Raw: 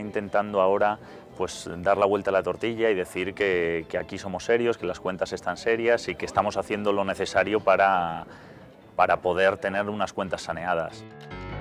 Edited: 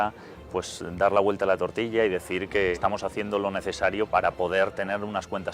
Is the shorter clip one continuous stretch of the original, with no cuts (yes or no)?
no